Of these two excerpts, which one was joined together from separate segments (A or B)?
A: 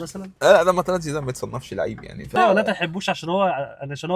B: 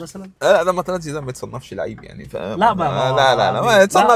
A